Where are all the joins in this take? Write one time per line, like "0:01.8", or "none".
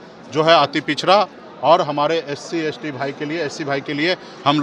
none